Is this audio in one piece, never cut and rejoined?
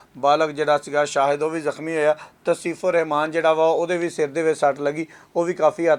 yes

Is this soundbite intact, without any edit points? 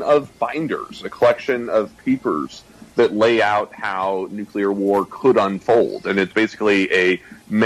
yes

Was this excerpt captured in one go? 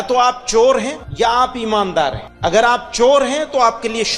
no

